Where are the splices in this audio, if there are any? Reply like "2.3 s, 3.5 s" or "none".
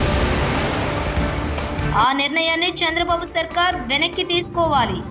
1.8 s

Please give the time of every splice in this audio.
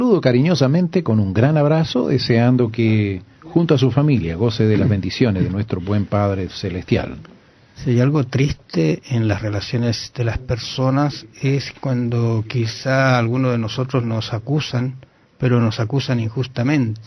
14.6 s

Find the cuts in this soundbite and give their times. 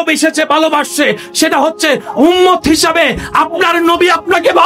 none

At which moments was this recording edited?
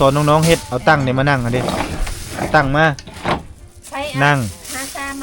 none

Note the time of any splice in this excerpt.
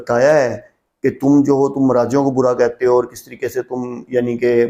none

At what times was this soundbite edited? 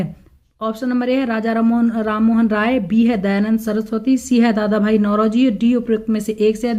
none

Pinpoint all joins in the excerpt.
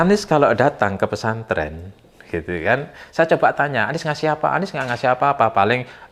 none

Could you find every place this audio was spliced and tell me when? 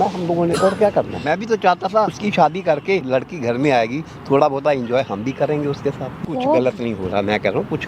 1.2 s, 2.2 s, 3.0 s, 6.2 s

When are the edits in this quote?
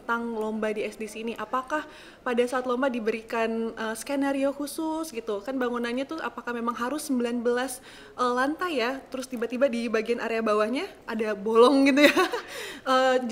none

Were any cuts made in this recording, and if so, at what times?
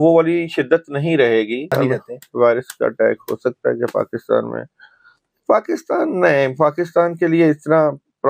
1.7 s

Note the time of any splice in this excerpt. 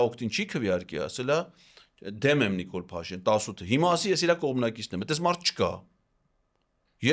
none

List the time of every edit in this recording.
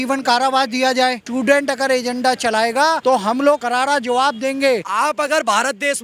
1.2 s, 3.0 s, 3.6 s, 4.9 s

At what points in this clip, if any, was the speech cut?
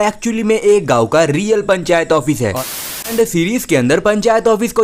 2.8 s

